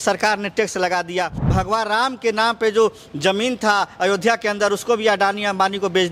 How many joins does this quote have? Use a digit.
1